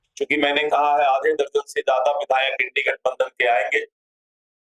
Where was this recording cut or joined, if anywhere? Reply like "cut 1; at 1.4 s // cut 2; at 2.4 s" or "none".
none